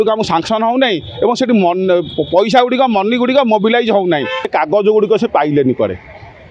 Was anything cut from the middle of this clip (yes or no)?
yes